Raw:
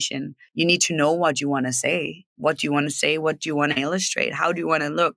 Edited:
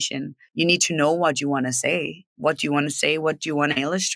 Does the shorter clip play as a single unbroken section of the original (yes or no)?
yes